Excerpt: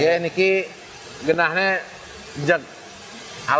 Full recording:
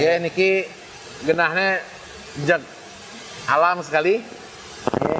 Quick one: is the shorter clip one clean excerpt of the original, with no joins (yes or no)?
yes